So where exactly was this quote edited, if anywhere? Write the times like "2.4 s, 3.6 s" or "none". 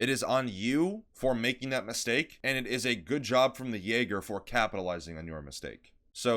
1.1 s, 2.3 s